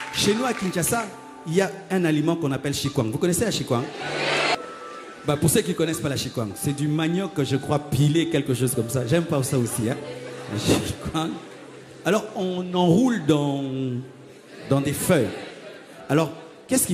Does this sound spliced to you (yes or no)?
yes